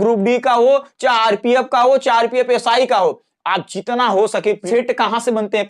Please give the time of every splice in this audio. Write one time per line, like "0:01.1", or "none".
0:04.6

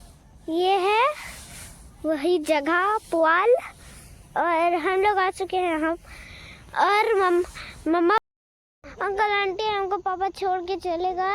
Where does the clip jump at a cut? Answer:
0:08.2

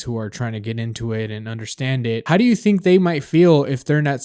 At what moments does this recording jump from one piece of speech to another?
0:02.2

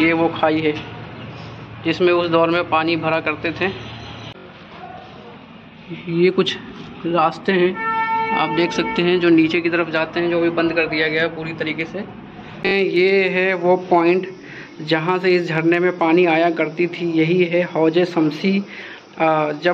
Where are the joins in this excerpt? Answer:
0:04.4
0:12.7

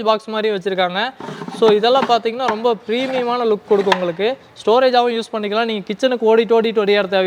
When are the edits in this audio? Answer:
none

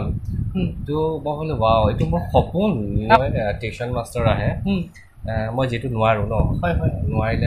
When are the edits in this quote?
0:03.2

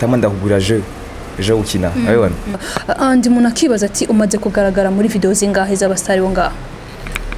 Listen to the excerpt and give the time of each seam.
0:02.6

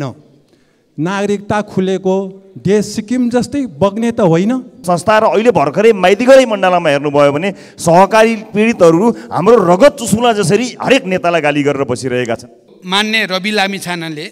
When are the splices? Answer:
0:04.7
0:12.7

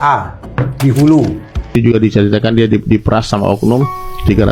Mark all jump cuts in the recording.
0:01.7

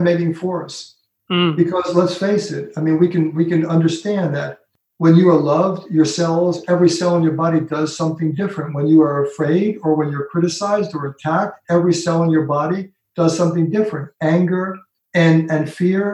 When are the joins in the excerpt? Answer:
none

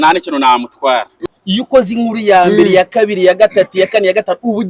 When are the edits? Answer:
0:01.1

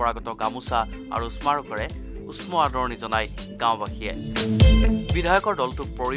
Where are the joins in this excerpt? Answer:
none

